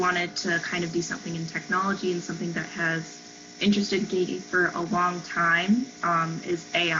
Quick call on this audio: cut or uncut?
uncut